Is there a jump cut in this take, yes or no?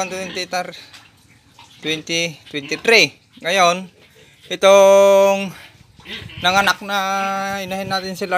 no